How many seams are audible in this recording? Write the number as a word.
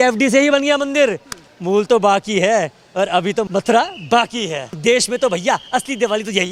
one